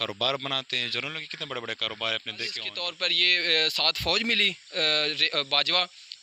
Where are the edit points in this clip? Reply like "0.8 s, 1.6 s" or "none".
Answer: 2.7 s